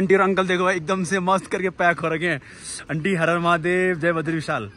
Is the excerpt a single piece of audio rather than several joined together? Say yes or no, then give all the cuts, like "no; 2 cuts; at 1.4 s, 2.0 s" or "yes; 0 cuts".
yes; 0 cuts